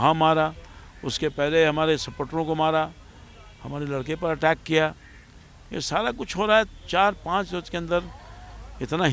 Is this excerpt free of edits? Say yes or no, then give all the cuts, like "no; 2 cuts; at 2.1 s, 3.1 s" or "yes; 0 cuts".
yes; 0 cuts